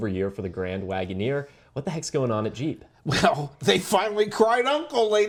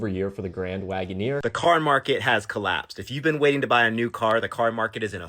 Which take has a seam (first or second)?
second